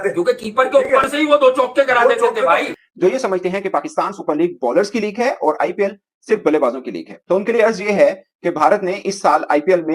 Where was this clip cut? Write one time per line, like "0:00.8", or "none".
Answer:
0:02.7